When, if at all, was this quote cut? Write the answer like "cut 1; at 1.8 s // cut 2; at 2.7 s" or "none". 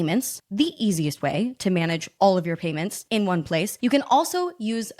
cut 1; at 3.8 s